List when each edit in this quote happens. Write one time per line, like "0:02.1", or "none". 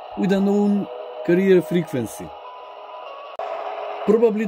0:03.4